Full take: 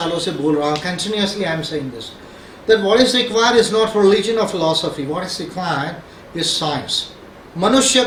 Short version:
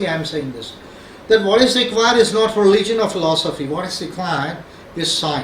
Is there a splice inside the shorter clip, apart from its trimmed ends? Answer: no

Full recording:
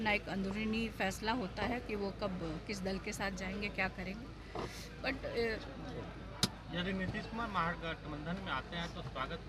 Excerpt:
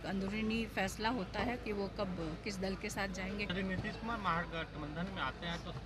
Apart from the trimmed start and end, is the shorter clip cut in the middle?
yes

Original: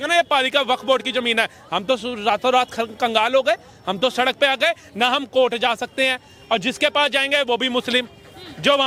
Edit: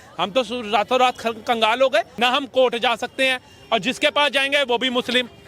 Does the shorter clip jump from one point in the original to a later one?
yes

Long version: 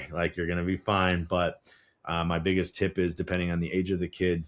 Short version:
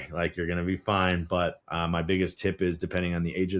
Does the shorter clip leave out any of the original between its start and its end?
yes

